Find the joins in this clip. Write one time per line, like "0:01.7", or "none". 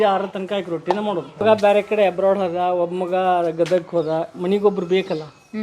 0:01.4